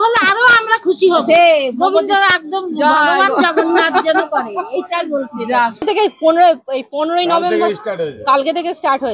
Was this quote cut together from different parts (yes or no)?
yes